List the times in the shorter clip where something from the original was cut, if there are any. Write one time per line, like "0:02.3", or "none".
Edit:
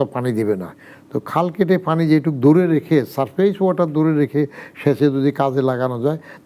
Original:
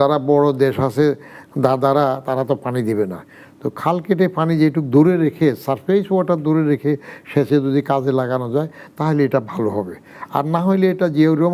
none